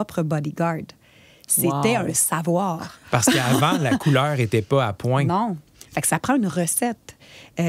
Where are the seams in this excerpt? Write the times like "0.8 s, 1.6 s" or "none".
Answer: none